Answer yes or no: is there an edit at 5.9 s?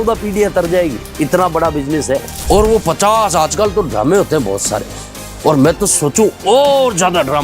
no